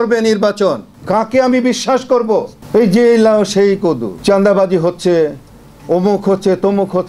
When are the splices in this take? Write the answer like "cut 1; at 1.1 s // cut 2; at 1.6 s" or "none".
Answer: cut 1; at 0.9 s // cut 2; at 2.6 s // cut 3; at 4.1 s